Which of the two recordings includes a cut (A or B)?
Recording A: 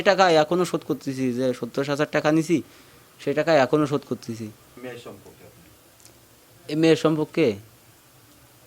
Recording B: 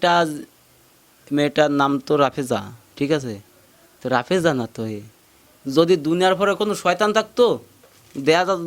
A